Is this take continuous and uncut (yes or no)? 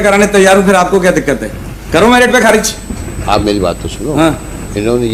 yes